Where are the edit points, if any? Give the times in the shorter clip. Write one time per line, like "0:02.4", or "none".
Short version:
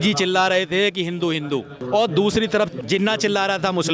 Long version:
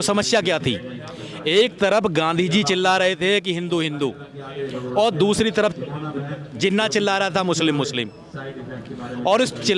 0:01.8
0:02.8